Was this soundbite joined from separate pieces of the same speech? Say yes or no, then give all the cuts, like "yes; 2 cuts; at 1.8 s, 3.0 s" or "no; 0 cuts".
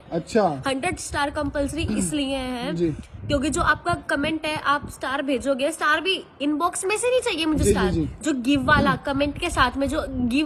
no; 0 cuts